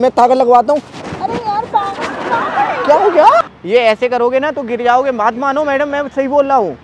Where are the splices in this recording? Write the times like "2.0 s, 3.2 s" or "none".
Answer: 3.4 s